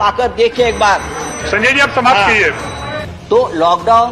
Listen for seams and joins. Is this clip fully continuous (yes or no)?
yes